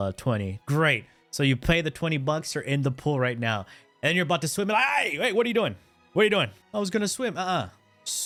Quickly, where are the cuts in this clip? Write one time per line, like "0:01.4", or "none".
none